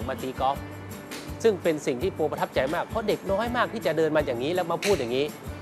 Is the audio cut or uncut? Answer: uncut